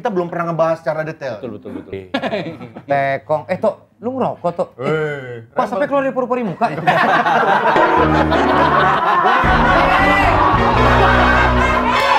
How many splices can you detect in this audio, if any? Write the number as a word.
one